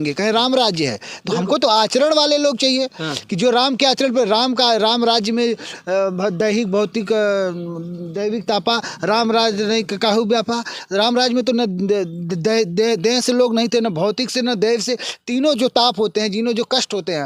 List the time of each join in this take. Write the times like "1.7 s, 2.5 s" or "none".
none